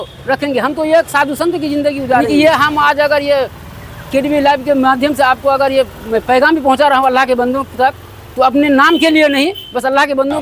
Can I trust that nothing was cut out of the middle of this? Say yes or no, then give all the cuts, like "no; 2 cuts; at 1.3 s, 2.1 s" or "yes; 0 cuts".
no; 1 cut; at 2.3 s